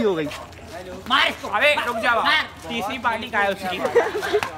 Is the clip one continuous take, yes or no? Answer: yes